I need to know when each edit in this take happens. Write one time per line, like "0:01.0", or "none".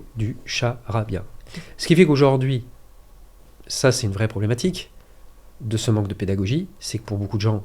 none